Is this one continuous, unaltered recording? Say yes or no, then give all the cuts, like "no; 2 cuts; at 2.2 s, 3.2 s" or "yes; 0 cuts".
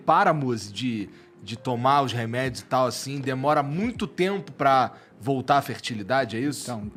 yes; 0 cuts